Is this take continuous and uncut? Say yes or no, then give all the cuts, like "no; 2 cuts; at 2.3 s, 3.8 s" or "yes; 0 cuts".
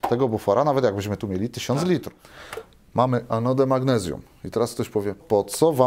no; 1 cut; at 2.1 s